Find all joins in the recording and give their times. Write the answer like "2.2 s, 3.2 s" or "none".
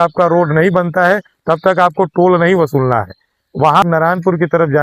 3.8 s

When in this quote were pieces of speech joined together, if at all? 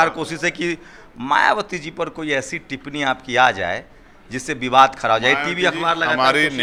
none

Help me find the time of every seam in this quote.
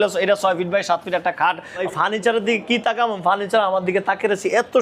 1.8 s

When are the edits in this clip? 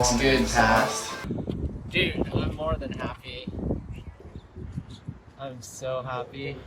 1.2 s, 4.2 s

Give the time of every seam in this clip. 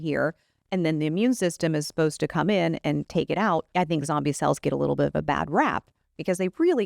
3.7 s

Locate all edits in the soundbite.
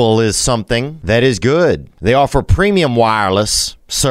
0.9 s, 1.9 s

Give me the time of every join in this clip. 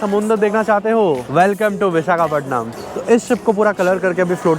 1.2 s, 2.7 s

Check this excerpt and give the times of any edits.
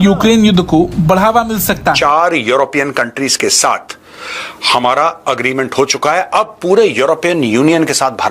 2.0 s

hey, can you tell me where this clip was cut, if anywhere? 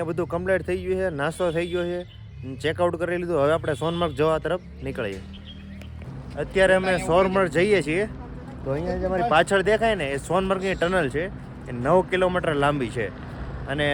none

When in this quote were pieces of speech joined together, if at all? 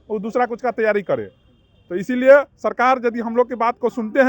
none

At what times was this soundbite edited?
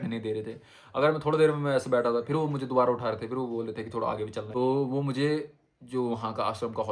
4.5 s

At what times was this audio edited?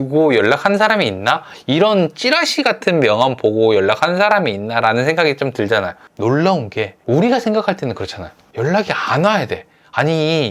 6.0 s

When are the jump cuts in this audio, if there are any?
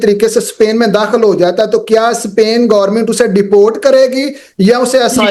none

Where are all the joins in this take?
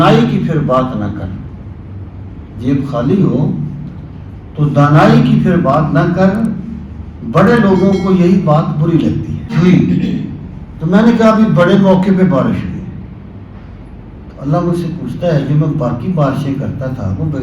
9.5 s

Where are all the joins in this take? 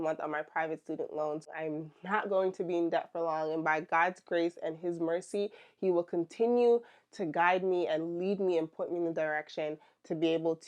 1.5 s

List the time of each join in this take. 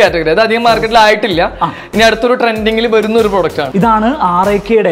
3.6 s

